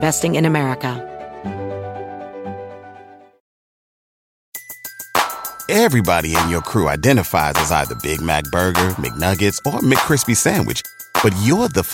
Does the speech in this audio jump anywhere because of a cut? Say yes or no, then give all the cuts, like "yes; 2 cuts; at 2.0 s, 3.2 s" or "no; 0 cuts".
yes; 1 cut; at 1.0 s